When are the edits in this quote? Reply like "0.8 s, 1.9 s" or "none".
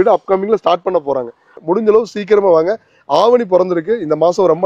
1.6 s